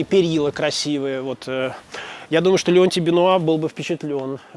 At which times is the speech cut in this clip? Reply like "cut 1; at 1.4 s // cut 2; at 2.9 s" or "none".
none